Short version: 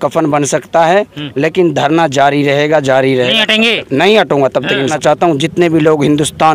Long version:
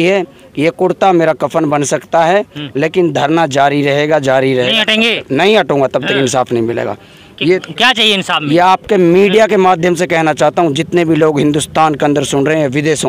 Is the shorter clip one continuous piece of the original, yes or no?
no